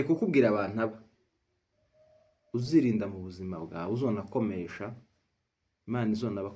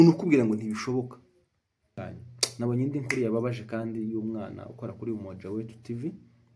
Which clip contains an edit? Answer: second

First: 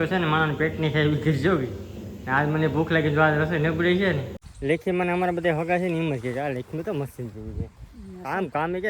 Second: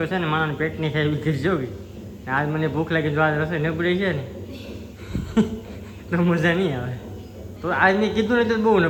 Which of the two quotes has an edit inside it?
first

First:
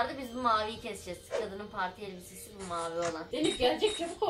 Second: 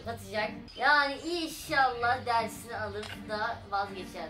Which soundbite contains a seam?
first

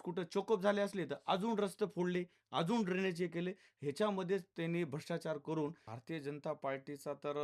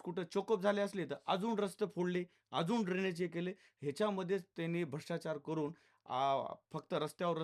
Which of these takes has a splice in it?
first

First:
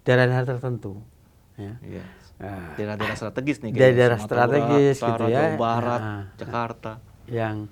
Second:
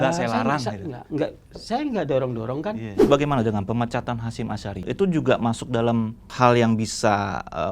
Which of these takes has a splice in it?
second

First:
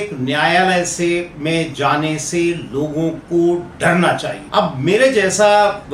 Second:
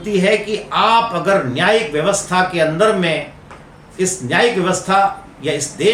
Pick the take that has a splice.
first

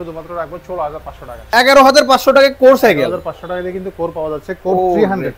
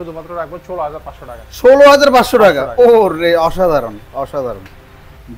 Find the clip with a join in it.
first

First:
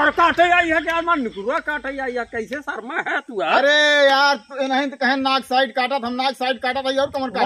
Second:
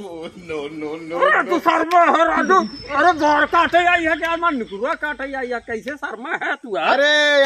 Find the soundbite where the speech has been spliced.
second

